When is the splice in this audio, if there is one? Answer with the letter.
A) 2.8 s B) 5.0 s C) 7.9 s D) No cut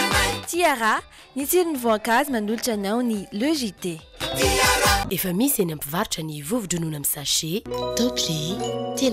B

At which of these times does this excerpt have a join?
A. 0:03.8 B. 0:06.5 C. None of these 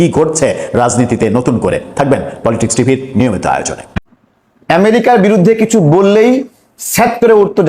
A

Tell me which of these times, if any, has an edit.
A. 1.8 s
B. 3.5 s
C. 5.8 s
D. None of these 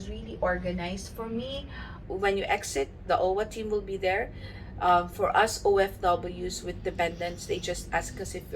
A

